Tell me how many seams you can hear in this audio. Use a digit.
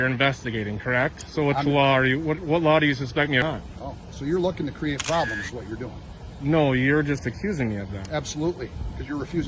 1